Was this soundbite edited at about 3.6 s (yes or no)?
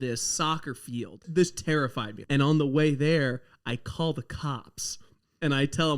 no